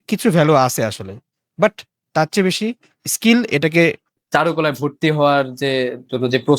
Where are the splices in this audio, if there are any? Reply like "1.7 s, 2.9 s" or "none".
4.1 s